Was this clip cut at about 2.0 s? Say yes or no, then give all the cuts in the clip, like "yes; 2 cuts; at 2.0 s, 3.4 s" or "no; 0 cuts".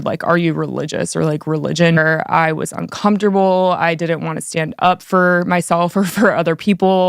yes; 1 cut; at 2.0 s